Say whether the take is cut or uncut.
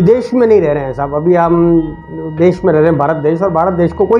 uncut